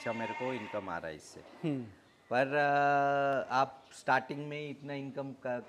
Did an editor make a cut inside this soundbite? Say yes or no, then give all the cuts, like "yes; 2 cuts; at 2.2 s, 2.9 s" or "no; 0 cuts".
no; 0 cuts